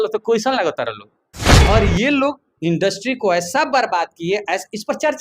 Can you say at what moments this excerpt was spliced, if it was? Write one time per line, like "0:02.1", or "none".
0:01.4